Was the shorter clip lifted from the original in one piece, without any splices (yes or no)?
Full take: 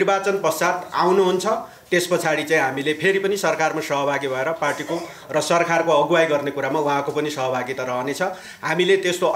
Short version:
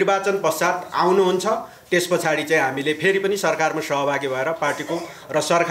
yes